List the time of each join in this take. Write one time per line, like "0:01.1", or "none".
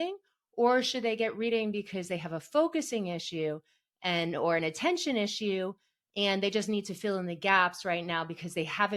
none